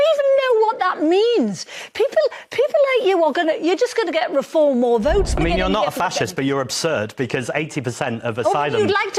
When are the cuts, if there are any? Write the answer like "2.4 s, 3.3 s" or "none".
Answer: 5.4 s